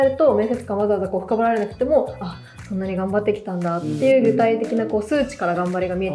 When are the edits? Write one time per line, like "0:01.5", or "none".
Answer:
none